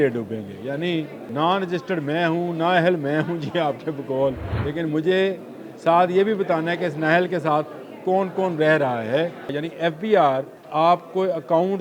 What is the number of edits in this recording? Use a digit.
4